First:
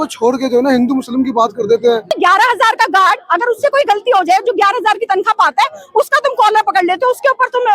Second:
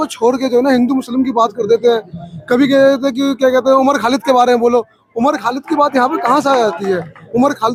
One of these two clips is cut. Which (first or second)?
first